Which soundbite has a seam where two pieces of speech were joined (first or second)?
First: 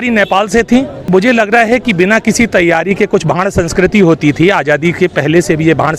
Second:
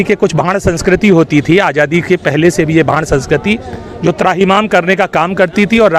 first